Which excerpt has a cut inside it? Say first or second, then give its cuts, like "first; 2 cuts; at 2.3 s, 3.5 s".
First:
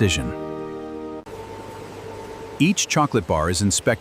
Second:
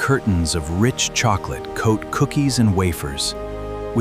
first; 1 cut; at 1.2 s